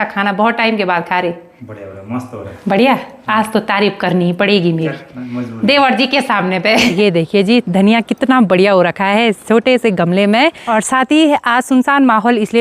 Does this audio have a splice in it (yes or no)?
yes